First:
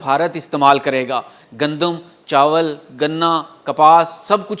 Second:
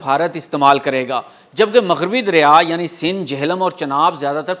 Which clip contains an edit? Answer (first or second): first